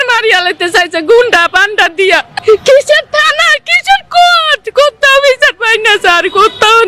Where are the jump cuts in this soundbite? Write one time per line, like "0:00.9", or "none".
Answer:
none